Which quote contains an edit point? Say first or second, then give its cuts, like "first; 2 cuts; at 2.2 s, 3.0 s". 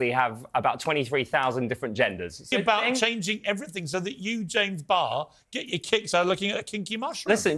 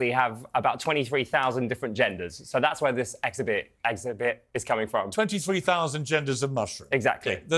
first; 1 cut; at 2.5 s